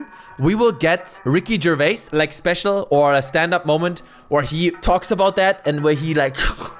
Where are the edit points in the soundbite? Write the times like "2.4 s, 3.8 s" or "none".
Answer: 1.1 s

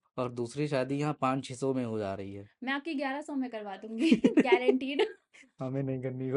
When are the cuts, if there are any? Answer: none

